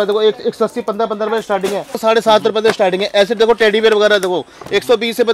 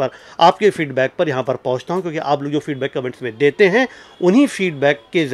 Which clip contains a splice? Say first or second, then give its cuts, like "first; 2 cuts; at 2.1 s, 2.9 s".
first; 1 cut; at 2.0 s